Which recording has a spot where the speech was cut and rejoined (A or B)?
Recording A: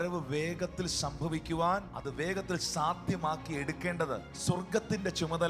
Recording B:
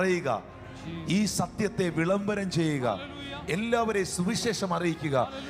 A